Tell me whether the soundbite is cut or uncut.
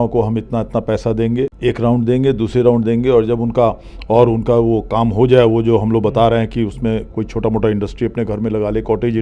cut